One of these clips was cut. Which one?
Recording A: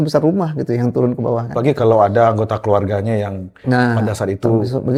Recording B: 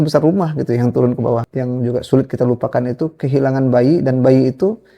B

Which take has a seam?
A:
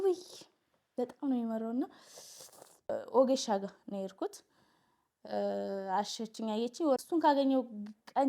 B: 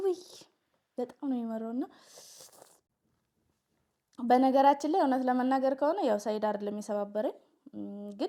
A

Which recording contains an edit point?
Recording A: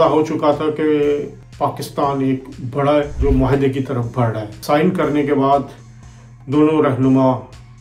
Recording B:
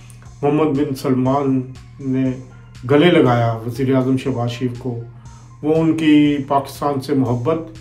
A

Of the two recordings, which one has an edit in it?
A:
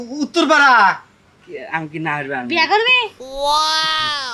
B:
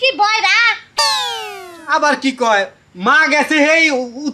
A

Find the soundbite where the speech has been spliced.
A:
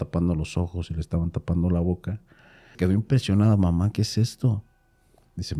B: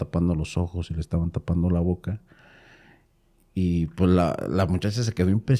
A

